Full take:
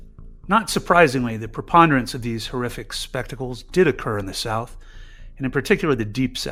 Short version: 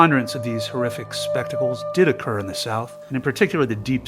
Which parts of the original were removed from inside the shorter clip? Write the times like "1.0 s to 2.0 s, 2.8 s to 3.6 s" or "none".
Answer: 4.7 s to 5.2 s